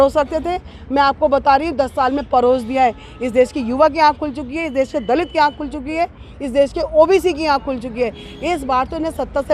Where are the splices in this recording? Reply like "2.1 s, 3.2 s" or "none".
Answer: none